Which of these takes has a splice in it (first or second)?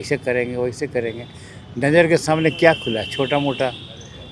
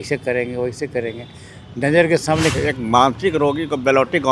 second